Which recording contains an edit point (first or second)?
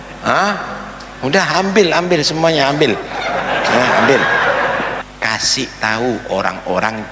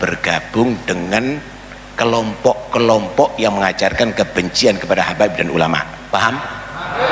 first